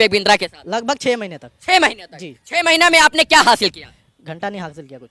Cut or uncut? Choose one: uncut